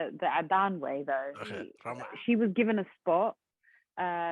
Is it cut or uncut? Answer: cut